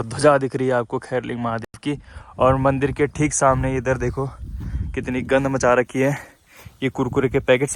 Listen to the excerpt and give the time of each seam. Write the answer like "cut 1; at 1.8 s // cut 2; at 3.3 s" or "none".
none